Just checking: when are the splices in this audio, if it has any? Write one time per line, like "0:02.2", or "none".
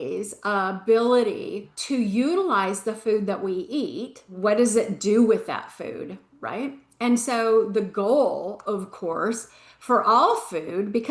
0:01.7
0:04.2